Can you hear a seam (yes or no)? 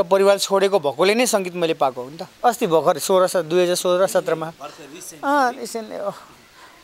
yes